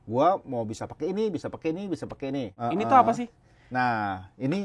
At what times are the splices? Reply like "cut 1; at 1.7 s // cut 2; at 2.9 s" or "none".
cut 1; at 2.5 s